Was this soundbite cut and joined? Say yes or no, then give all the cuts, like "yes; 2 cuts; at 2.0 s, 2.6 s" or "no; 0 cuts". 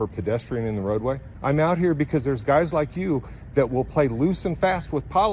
yes; 1 cut; at 1.3 s